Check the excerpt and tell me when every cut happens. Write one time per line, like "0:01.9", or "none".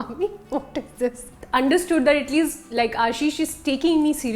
0:01.4